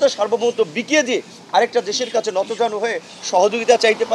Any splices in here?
no; 0 cuts

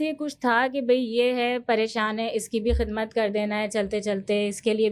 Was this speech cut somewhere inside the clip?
no; 0 cuts

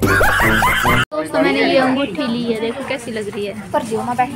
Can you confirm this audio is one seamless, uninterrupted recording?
no; 1 cut; at 1.0 s

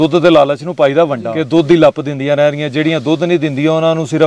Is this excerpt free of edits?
no; 1 cut; at 1.3 s

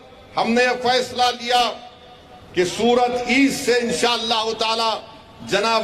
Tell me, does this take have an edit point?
no; 0 cuts

